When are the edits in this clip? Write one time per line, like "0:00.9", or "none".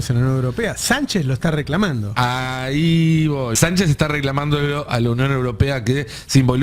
0:03.5